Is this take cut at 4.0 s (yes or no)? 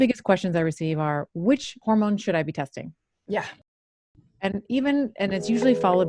no